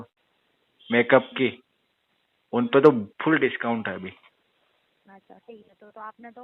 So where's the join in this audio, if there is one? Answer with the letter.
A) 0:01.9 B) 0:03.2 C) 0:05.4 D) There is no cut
D